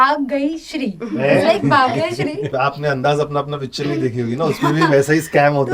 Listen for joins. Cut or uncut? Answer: cut